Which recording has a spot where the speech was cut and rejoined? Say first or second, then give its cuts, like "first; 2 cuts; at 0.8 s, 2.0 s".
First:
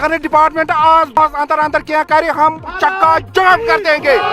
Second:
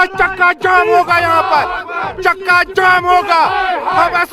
first; 1 cut; at 1.2 s